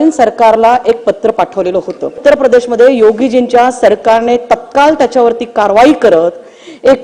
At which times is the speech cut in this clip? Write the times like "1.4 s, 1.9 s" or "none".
2.2 s